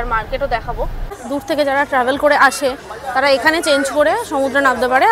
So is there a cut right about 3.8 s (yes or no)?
no